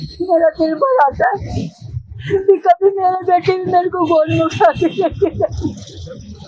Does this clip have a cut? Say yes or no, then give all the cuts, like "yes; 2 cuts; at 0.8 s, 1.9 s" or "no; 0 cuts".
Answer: no; 0 cuts